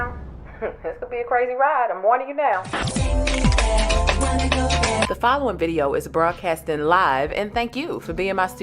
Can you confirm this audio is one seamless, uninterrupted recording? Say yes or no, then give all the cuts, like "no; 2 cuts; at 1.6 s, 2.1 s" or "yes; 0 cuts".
no; 1 cut; at 5.0 s